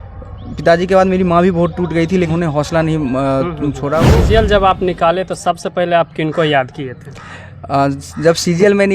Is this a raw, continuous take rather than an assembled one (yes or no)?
no